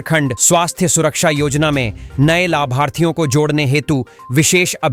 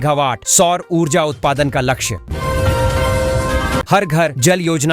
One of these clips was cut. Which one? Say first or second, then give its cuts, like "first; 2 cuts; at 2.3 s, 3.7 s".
second; 2 cuts; at 2.2 s, 3.9 s